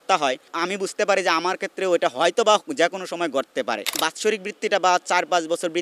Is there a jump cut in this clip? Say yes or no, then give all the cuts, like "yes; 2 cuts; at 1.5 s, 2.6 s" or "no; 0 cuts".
yes; 1 cut; at 4.0 s